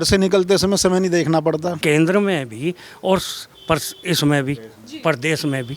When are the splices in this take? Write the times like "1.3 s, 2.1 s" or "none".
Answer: 1.7 s